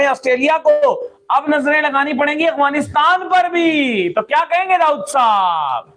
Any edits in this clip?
no; 0 cuts

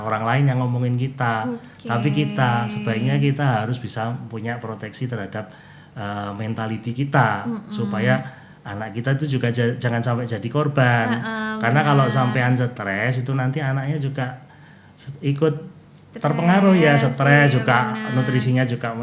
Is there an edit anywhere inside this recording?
no; 0 cuts

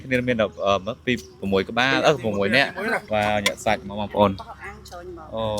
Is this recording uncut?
no; 1 cut; at 3.0 s

